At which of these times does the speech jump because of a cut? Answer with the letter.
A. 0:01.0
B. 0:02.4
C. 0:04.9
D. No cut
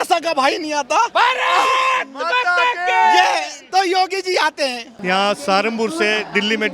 C